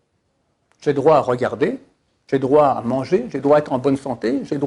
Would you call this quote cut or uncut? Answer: uncut